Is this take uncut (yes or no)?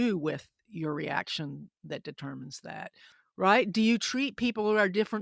no